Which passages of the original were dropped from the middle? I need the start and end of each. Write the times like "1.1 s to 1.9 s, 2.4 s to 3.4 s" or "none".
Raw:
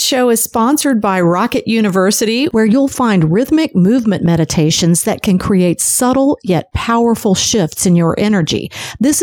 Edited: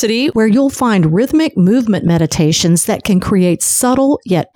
none